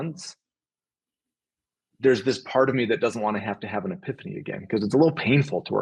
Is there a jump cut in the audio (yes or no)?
no